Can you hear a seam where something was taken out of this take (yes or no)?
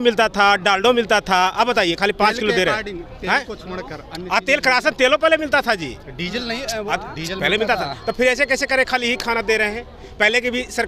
no